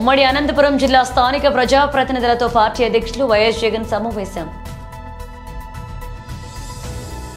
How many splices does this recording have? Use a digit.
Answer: 1